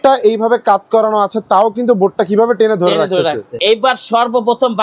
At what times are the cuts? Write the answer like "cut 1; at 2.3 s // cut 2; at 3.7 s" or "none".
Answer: cut 1; at 3.5 s